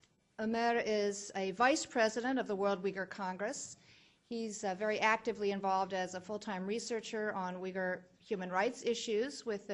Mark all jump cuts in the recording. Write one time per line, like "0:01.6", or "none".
0:05.6